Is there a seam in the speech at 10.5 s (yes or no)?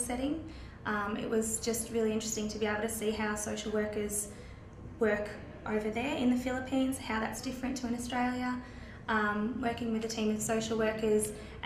yes